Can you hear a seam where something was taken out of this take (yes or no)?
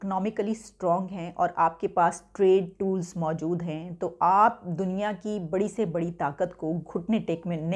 no